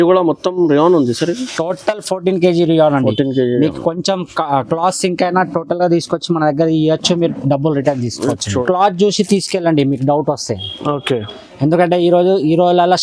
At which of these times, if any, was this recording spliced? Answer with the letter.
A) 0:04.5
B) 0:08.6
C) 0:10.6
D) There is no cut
B